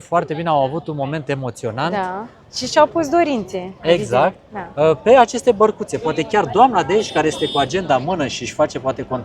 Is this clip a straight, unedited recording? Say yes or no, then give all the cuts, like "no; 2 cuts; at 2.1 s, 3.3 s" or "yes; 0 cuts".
yes; 0 cuts